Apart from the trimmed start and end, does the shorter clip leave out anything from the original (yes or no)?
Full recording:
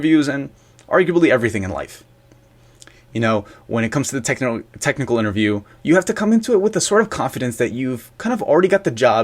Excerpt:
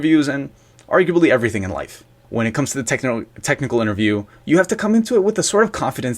yes